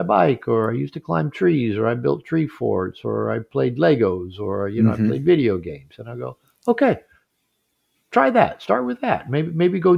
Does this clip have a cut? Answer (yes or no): no